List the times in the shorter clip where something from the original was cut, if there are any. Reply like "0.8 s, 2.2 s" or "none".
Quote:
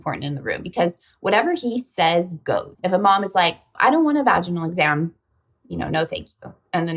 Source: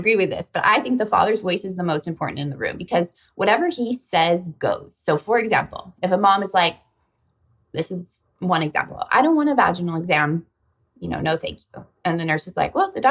2.7 s, 3.7 s